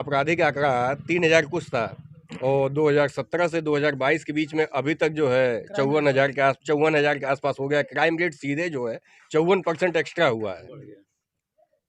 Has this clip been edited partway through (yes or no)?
no